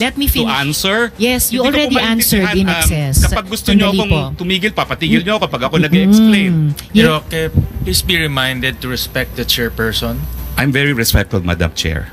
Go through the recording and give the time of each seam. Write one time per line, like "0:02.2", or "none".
0:07.1